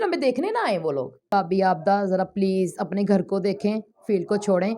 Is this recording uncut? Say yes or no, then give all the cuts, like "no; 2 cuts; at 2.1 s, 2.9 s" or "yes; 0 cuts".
no; 1 cut; at 1.3 s